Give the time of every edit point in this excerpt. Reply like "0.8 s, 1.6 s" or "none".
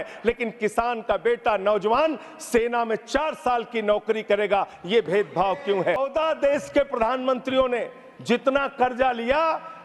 6.0 s